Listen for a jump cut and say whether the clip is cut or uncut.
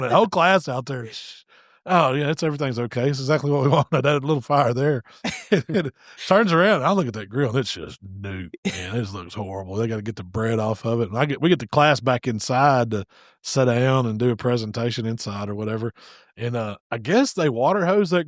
uncut